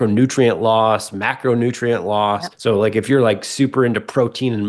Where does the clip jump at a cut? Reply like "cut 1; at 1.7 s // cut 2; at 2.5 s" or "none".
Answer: cut 1; at 2.5 s